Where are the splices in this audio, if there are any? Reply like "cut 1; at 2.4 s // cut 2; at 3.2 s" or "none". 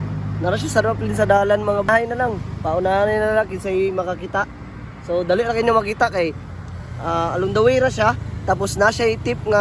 cut 1; at 1.9 s